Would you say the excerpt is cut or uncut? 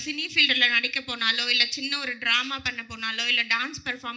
uncut